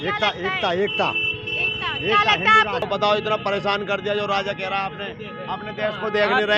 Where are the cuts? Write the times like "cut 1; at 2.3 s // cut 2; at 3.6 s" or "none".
cut 1; at 2.9 s